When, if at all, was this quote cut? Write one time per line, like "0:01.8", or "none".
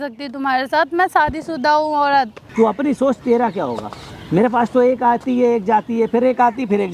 0:02.4